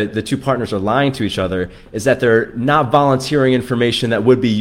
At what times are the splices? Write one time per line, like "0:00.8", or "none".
none